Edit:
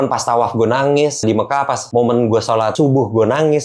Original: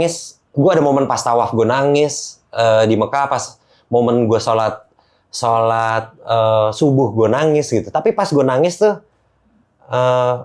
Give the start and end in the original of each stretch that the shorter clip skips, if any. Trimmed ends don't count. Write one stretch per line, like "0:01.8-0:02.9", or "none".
0:02.4-0:03.4
0:04.7-0:06.8